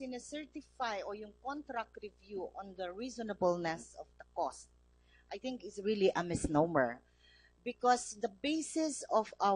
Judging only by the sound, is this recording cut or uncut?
cut